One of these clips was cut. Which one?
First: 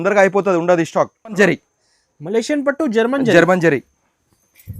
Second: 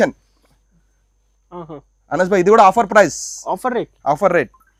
first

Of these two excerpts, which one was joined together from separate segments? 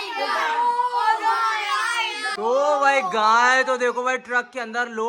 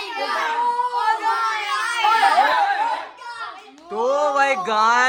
first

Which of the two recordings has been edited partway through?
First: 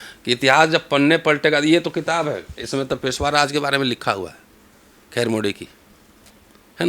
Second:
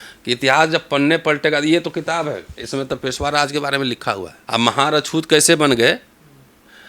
second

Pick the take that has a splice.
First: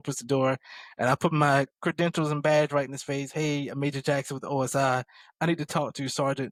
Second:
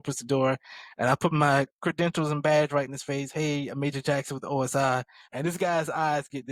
second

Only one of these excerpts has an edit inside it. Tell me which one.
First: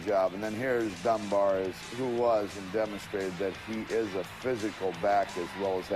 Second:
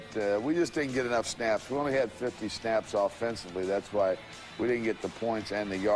second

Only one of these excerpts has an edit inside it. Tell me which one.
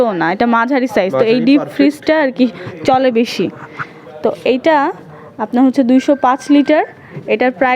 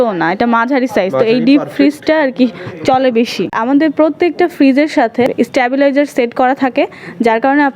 second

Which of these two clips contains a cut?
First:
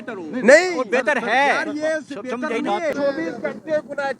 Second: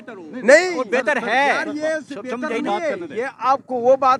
first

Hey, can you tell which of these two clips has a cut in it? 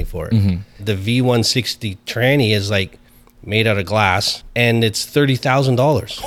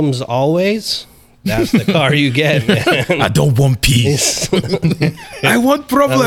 first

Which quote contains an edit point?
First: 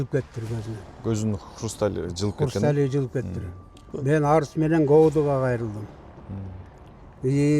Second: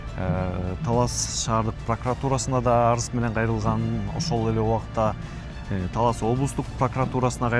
first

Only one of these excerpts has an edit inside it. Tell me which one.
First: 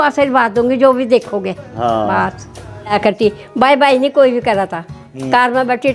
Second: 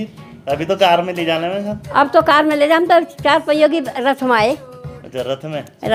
first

